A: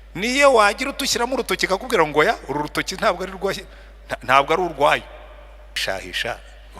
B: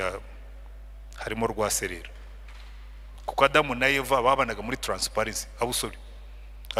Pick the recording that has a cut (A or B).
A